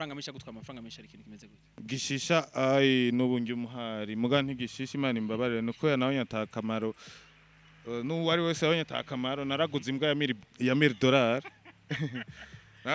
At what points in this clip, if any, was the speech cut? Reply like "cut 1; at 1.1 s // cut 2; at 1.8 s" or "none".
cut 1; at 1.6 s